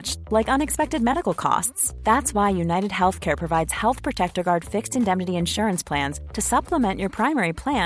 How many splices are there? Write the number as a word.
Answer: zero